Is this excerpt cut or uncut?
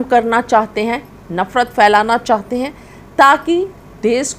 uncut